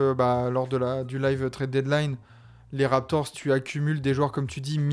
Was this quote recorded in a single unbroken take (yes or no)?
yes